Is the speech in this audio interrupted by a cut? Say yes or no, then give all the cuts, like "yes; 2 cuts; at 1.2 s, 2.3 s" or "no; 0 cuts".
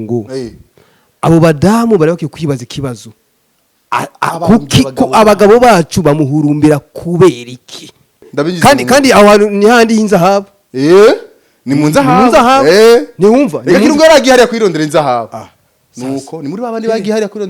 yes; 1 cut; at 8.3 s